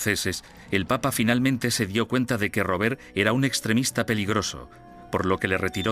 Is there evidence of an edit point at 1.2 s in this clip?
yes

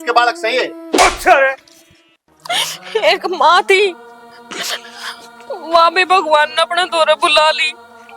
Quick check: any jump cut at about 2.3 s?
yes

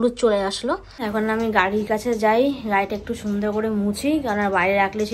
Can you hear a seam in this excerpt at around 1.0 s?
yes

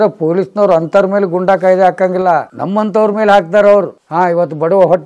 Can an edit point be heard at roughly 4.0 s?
yes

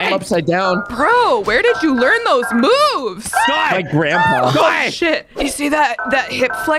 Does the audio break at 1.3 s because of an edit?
no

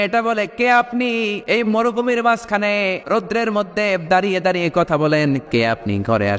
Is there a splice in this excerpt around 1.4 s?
yes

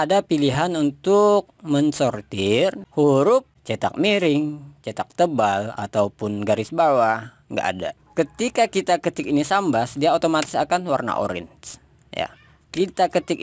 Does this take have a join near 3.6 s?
yes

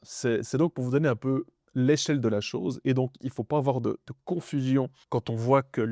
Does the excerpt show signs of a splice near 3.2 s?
no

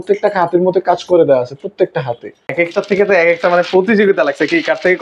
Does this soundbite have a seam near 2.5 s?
yes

